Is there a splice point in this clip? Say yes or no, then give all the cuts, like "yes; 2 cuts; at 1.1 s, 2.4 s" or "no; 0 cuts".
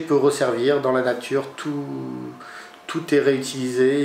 no; 0 cuts